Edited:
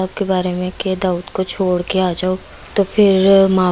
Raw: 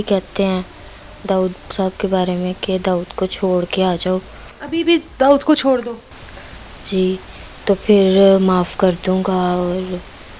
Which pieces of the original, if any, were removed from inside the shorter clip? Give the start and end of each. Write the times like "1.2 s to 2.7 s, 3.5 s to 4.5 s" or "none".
4.4 s to 7.5 s